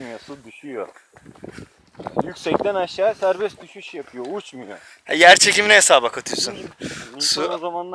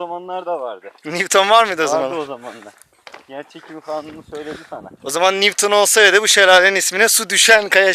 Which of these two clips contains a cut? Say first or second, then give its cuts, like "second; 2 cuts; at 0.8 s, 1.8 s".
first; 2 cuts; at 1.1 s, 6.7 s